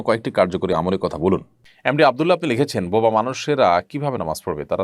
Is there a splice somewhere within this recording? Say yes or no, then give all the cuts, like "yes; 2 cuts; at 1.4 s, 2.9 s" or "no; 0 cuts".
yes; 1 cut; at 1.7 s